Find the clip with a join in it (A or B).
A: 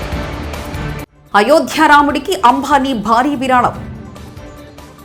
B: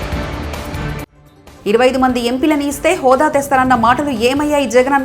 B